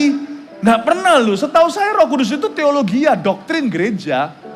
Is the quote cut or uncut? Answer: uncut